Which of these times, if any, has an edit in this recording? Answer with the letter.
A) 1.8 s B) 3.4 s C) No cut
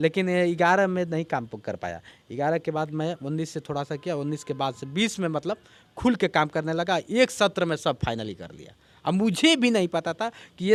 C